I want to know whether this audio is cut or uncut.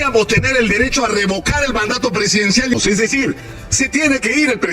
cut